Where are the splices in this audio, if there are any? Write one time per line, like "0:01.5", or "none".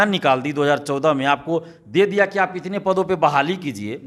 none

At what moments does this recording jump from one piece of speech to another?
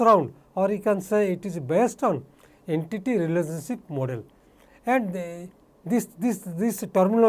none

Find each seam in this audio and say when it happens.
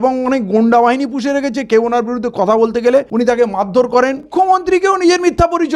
0:03.1
0:04.3

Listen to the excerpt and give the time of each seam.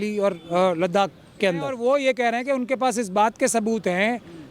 0:01.8

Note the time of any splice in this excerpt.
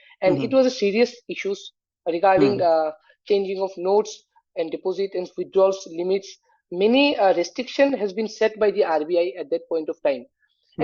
none

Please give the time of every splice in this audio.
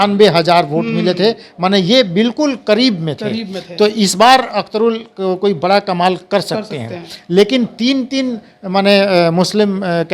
none

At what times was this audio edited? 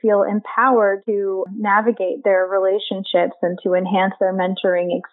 0:01.2

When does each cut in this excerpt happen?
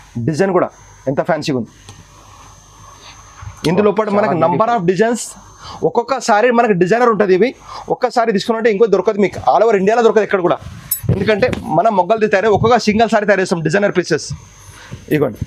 none

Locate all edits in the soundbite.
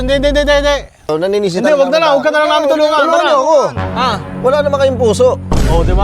0:01.1

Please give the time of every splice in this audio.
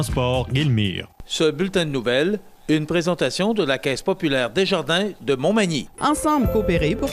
0:01.1

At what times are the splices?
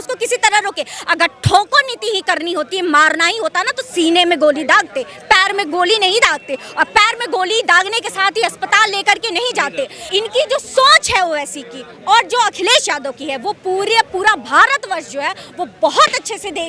0:10.0

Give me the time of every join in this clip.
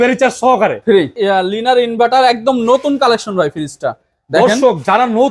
0:01.2

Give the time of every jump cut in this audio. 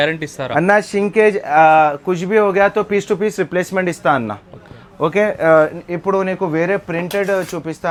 none

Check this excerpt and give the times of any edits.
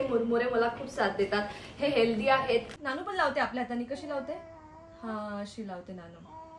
0:02.7

